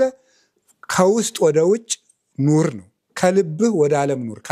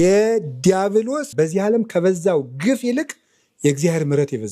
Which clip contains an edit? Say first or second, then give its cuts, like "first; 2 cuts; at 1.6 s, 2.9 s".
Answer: second; 1 cut; at 1.3 s